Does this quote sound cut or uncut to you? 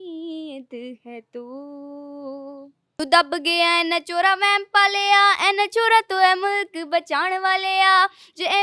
cut